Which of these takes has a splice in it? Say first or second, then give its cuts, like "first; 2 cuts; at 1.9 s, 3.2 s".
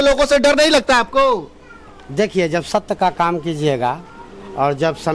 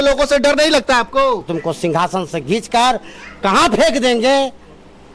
second; 1 cut; at 1.4 s